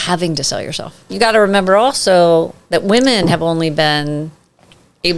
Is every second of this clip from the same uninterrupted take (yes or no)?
no